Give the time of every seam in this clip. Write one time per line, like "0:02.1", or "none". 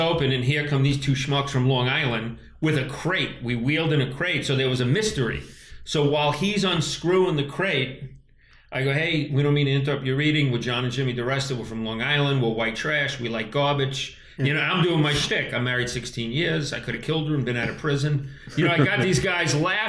none